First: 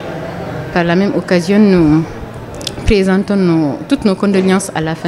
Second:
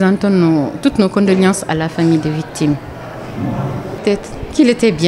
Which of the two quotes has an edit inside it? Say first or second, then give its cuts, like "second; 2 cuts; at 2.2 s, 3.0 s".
second; 1 cut; at 4.0 s